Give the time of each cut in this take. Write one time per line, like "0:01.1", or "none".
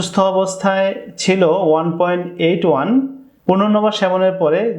none